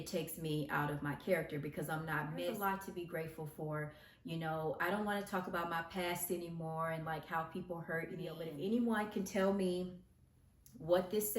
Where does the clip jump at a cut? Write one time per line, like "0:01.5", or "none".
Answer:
0:02.5
0:08.5